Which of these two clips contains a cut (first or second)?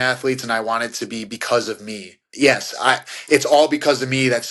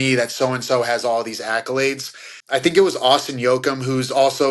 second